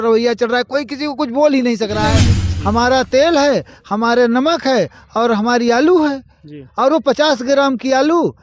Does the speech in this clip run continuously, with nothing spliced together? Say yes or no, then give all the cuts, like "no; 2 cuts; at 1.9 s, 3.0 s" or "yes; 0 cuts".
no; 1 cut; at 2.3 s